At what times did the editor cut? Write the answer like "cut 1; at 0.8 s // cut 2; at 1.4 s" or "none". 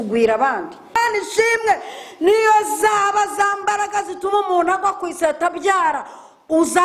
cut 1; at 1.0 s